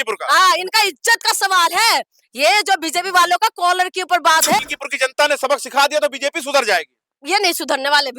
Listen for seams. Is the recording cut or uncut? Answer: cut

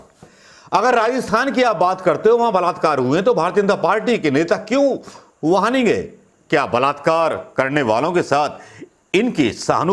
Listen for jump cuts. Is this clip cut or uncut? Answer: uncut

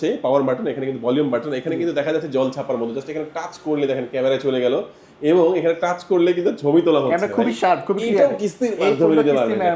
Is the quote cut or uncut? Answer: uncut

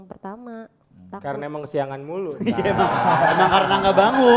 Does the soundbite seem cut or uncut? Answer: uncut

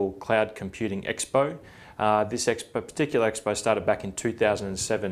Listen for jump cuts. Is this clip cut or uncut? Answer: cut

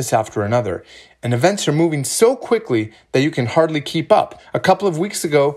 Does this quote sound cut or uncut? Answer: cut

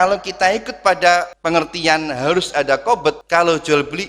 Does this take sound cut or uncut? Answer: cut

